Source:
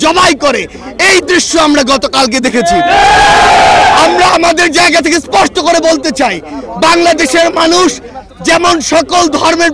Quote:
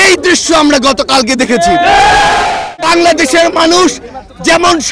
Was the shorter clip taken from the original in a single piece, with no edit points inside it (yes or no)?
no